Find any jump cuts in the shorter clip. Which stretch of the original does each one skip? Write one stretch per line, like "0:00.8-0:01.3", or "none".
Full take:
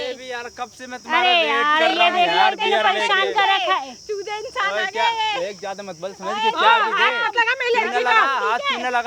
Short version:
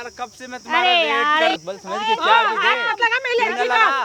0:02.0-0:05.9